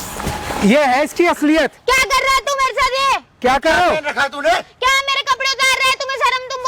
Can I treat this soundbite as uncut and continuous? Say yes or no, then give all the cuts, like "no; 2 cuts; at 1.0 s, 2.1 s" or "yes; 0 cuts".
yes; 0 cuts